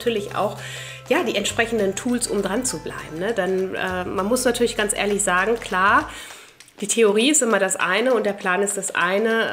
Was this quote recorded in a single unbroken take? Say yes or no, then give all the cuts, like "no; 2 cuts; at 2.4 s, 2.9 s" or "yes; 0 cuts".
yes; 0 cuts